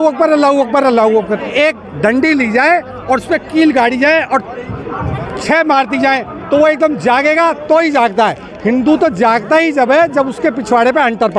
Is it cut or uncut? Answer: cut